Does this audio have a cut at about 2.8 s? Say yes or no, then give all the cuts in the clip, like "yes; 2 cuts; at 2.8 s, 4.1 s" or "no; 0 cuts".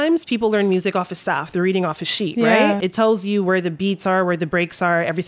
yes; 1 cut; at 2.8 s